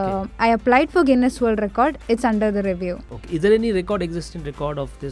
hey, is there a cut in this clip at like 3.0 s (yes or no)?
no